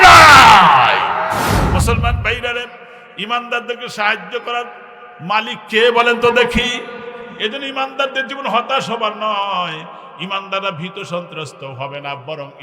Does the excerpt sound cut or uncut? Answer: cut